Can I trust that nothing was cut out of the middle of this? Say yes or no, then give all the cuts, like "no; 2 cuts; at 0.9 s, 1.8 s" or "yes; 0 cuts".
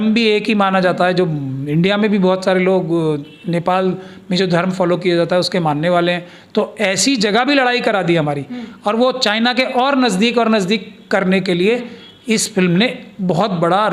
yes; 0 cuts